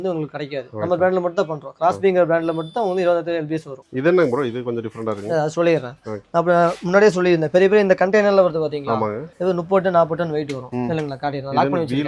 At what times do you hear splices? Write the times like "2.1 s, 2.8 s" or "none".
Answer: none